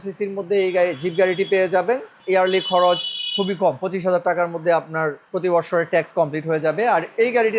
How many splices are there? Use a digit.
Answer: 2